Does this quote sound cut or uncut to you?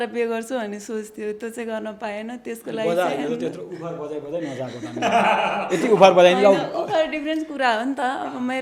uncut